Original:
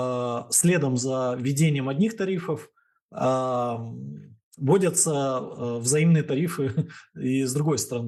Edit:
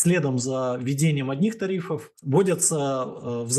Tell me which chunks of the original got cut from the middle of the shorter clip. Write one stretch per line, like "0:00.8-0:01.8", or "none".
0:02.7-0:04.4

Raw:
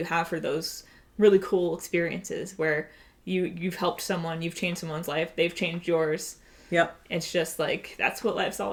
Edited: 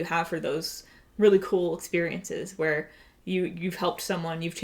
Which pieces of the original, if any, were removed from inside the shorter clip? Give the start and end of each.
none

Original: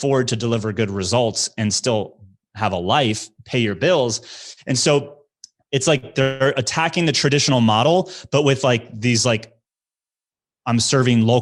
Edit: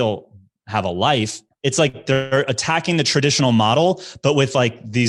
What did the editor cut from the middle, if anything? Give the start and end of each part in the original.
0:03.3-0:05.5

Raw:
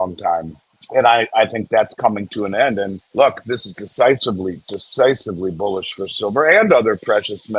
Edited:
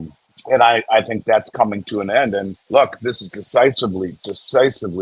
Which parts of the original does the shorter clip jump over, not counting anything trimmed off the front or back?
none

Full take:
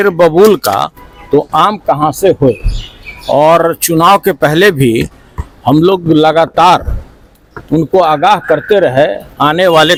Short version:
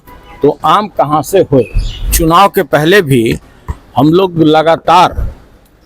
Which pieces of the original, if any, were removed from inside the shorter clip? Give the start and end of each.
0:03.0-0:03.8

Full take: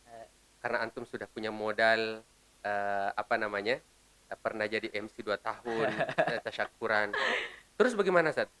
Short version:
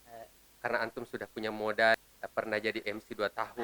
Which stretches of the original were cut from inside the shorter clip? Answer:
0:02.0-0:04.0

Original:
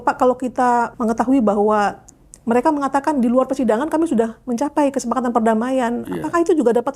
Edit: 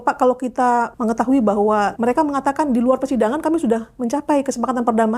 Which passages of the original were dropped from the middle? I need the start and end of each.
0:01.9-0:02.4

